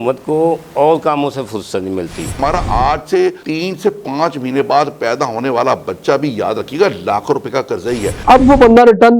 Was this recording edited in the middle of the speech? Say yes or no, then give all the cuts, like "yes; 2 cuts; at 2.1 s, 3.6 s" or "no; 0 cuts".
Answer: yes; 2 cuts; at 2.4 s, 8.2 s